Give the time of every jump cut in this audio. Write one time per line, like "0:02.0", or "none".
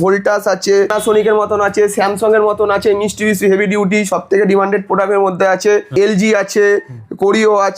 0:01.0
0:05.9